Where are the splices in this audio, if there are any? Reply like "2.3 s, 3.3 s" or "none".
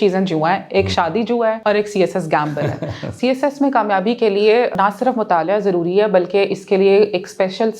1.6 s, 3.1 s, 4.7 s

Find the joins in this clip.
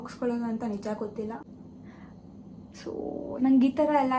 1.4 s

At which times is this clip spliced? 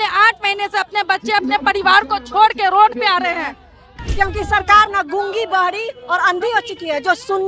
3.9 s

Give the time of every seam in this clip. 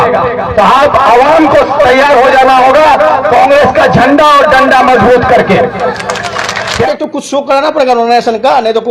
6.9 s

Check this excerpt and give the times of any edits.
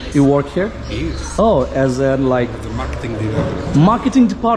none

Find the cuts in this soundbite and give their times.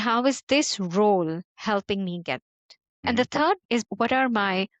1.5 s, 2.9 s, 3.8 s

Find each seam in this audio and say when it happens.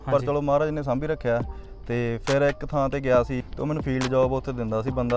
3.4 s

